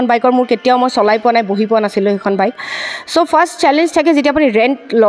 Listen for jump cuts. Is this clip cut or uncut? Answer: uncut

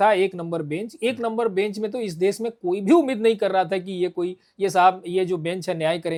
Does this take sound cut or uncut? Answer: uncut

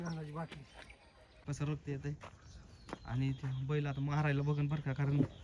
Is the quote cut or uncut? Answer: cut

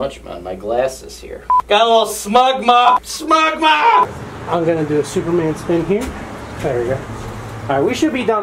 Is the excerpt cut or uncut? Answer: uncut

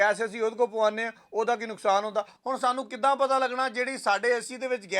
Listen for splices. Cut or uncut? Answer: cut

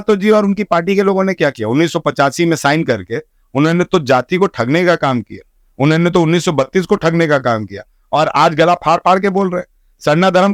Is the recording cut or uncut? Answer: uncut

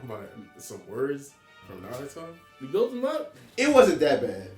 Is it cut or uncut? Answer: cut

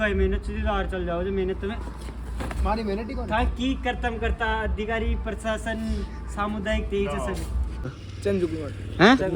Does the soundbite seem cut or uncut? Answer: cut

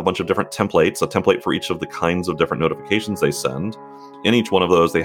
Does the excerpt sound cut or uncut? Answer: uncut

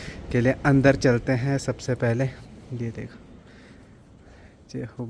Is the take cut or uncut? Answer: uncut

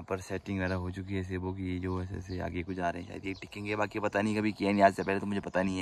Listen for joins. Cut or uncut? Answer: uncut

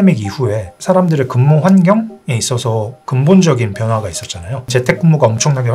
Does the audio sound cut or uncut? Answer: cut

